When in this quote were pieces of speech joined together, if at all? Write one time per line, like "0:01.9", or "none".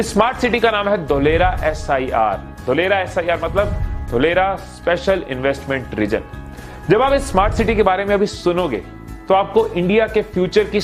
none